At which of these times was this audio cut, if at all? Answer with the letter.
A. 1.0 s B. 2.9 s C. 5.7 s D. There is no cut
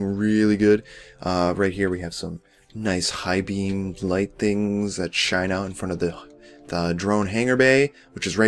C